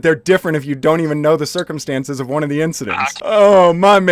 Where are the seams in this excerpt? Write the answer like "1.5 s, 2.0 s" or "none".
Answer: 3.2 s